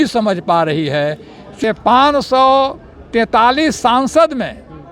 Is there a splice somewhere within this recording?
yes; 1 cut; at 1.6 s

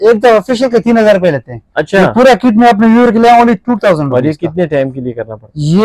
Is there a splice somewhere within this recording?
no; 0 cuts

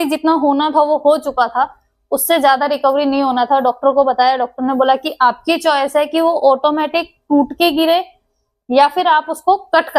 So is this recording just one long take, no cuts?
yes; 0 cuts

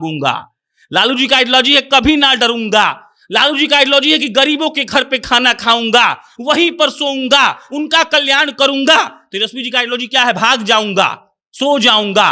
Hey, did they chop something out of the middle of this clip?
no; 0 cuts

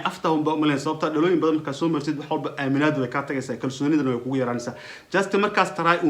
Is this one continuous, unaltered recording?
yes; 0 cuts

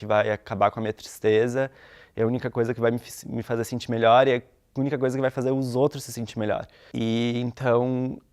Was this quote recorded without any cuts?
no; 1 cut; at 6.8 s

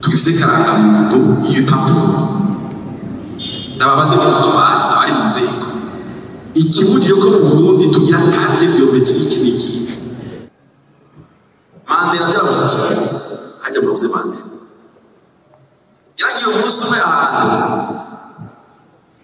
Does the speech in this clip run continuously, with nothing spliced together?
no; 1 cut; at 10.4 s

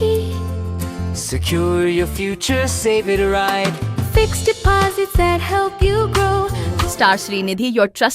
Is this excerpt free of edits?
no; 1 cut; at 6.7 s

